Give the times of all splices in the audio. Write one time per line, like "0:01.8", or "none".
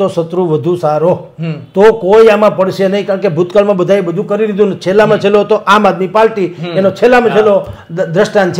none